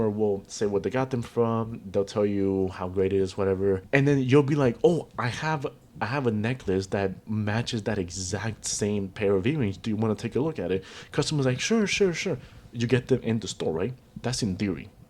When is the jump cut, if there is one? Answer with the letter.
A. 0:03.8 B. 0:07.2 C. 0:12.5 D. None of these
A